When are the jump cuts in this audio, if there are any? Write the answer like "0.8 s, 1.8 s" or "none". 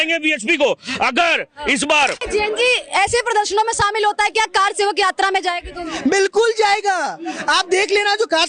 2.2 s